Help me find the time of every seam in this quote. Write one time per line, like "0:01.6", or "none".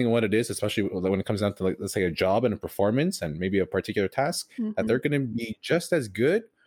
none